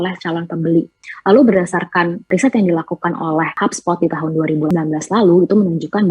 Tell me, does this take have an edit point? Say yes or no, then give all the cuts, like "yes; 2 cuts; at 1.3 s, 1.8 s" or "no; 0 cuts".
yes; 4 cuts; at 1.0 s, 2.3 s, 3.6 s, 4.7 s